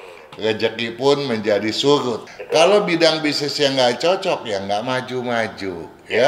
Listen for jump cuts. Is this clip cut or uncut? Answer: cut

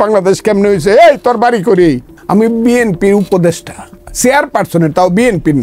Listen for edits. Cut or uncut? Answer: cut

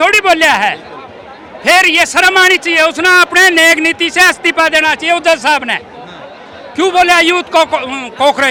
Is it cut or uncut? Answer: uncut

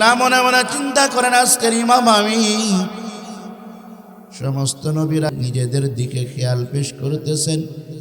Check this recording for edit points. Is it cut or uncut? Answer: cut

